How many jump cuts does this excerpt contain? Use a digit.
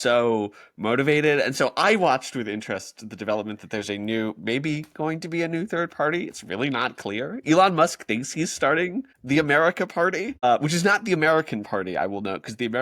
2